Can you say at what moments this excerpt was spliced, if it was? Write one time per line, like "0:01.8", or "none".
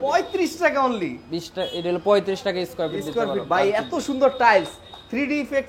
none